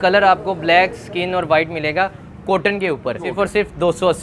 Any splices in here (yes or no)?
yes